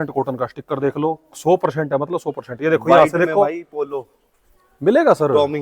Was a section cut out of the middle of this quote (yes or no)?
no